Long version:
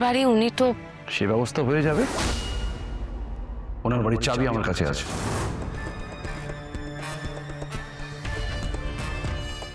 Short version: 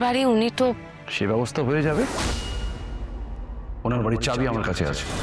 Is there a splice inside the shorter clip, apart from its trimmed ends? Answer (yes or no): no